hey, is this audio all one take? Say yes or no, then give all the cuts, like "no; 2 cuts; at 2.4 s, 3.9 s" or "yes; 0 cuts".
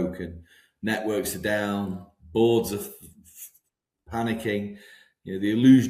yes; 0 cuts